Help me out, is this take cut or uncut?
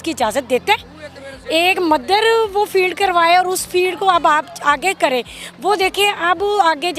uncut